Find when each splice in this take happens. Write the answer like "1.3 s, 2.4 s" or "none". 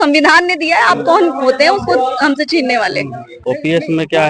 3.3 s